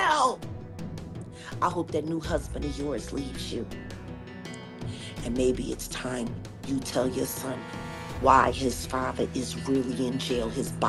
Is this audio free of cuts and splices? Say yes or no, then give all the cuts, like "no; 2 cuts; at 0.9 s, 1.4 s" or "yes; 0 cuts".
yes; 0 cuts